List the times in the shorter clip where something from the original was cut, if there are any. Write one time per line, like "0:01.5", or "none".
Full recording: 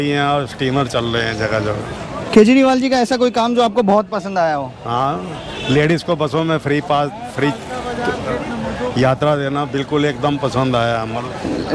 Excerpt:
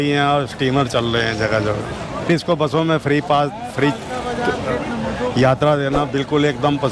0:02.3